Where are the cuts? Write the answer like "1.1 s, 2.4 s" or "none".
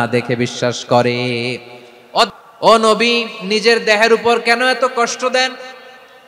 2.4 s